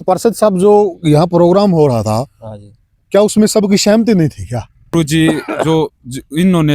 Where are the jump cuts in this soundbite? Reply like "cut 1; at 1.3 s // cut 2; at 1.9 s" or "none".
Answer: cut 1; at 4.9 s